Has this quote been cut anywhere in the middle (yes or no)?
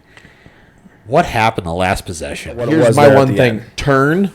yes